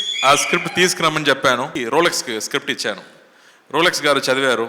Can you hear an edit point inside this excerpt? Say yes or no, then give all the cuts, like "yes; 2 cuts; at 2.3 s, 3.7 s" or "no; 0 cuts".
yes; 1 cut; at 1.8 s